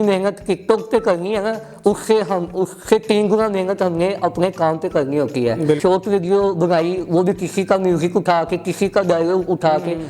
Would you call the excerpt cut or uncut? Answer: cut